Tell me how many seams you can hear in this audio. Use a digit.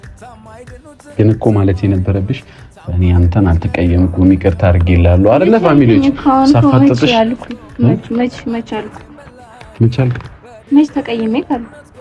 1